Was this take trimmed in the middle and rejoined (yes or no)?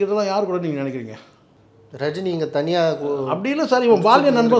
no